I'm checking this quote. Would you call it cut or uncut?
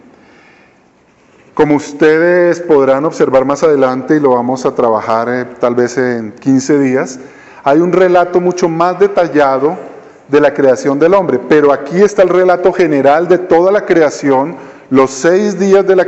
uncut